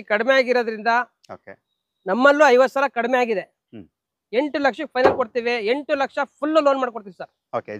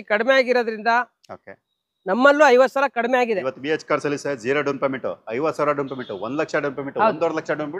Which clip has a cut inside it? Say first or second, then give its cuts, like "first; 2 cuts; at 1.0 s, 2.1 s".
second; 1 cut; at 3.5 s